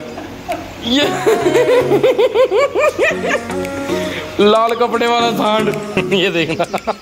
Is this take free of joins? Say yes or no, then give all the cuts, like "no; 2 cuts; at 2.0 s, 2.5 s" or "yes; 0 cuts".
no; 1 cut; at 5.9 s